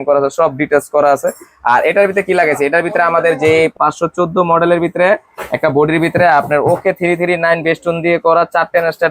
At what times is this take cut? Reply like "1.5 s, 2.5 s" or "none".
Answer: 3.7 s